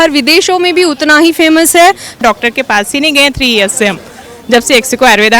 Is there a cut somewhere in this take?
yes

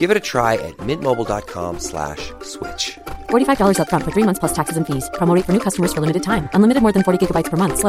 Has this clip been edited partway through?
no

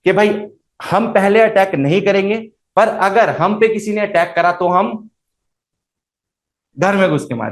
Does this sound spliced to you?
no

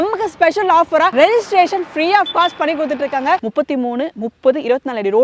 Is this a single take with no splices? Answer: no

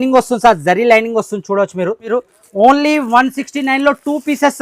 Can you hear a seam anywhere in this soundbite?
yes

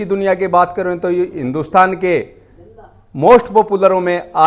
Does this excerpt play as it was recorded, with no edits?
yes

